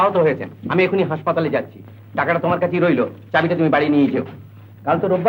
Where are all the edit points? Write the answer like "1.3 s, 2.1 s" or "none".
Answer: none